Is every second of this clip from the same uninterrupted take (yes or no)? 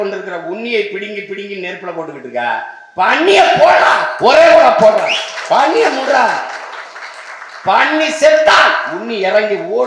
yes